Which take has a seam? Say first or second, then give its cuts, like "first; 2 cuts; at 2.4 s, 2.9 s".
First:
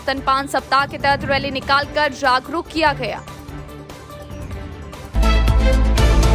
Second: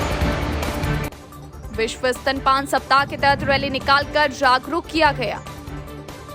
first; 1 cut; at 5.1 s